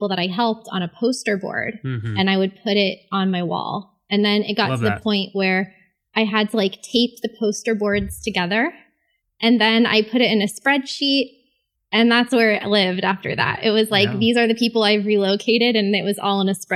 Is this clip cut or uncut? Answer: uncut